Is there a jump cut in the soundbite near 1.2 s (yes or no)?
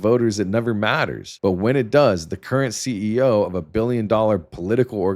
yes